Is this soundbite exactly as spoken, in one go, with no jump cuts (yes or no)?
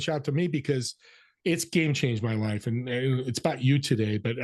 yes